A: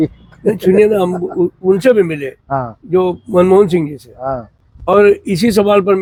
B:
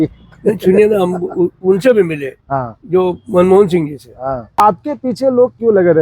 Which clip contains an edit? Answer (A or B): B